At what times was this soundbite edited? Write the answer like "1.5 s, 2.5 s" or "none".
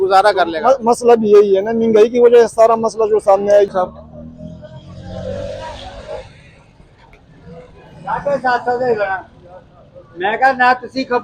3.7 s